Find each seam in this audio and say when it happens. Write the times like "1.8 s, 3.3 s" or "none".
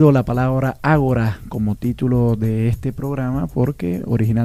3.4 s